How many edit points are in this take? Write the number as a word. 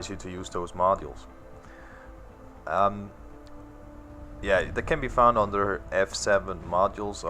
one